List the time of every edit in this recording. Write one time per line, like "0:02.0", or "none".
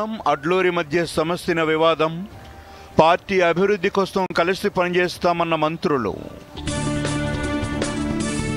none